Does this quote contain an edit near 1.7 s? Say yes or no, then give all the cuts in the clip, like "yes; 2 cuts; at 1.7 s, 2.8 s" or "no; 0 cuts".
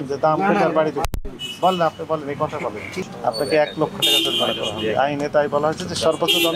no; 1 cut; at 3.0 s